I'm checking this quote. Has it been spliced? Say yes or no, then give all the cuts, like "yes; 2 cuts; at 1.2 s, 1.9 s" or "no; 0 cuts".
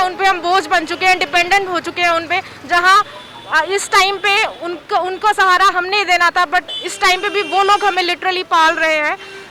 no; 0 cuts